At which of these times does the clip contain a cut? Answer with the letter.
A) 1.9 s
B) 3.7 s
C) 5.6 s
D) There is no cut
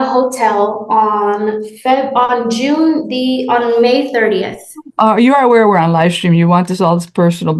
D